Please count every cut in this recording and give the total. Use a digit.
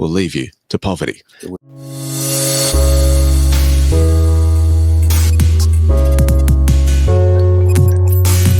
1